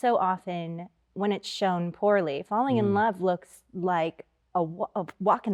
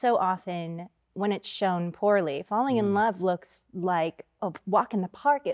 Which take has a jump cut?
second; 1 cut; at 4.4 s

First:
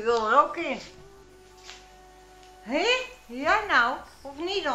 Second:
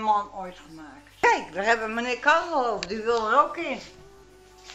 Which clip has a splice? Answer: second; 1 cut; at 1.2 s

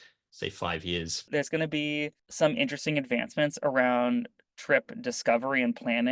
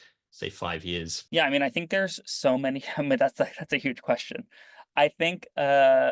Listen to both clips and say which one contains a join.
first; 1 cut; at 1.3 s

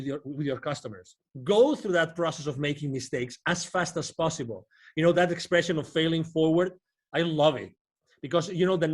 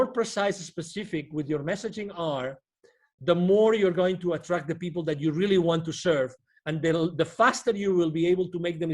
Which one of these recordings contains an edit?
first; 1 cut; at 1.3 s

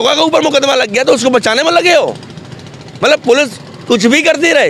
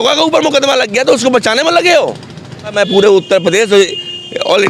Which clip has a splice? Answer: second; 1 cut; at 2.7 s

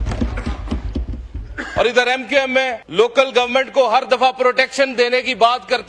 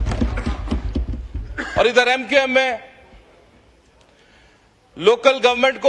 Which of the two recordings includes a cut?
first; 1 cut; at 2.8 s

